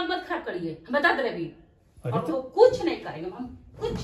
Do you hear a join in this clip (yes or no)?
no